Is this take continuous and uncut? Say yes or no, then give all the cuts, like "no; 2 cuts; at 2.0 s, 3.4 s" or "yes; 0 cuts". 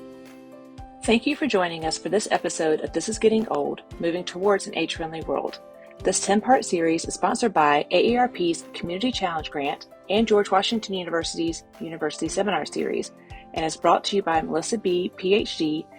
no; 1 cut; at 1.1 s